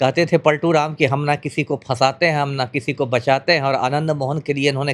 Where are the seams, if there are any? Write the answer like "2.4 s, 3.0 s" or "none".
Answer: none